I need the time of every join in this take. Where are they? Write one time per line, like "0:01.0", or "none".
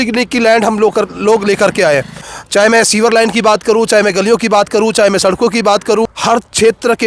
0:02.3
0:06.1